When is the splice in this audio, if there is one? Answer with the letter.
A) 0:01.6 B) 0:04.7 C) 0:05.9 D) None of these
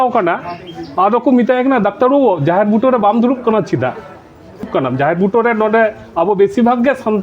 B